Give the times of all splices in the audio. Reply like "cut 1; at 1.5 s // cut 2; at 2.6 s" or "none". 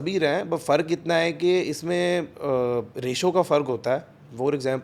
none